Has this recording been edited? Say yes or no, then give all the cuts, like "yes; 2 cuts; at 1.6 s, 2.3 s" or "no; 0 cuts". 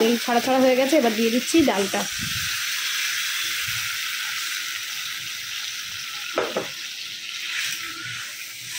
no; 0 cuts